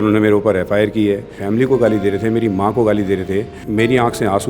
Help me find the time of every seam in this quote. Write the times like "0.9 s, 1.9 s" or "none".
1.4 s, 3.6 s

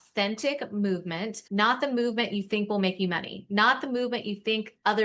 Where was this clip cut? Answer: 1.4 s

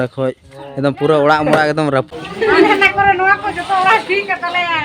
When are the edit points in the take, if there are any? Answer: 2.1 s

